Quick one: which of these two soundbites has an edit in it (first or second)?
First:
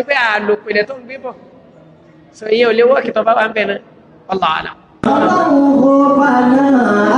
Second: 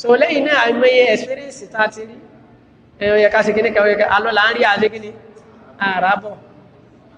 first